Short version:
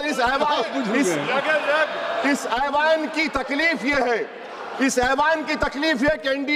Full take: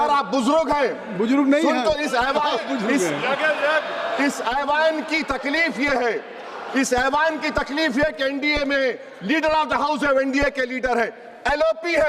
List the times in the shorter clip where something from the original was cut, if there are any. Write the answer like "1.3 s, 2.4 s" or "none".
none